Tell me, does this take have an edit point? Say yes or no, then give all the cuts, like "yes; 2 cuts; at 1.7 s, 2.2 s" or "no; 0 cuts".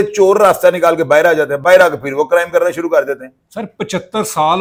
no; 0 cuts